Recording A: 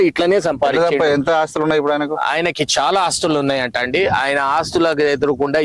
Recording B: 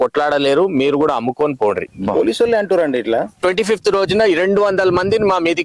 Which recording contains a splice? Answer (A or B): B